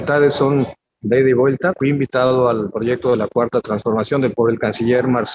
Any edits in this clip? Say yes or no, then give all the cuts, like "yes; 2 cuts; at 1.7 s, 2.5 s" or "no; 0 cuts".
yes; 2 cuts; at 1.8 s, 4.3 s